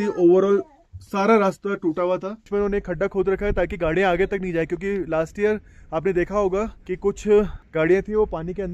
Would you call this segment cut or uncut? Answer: cut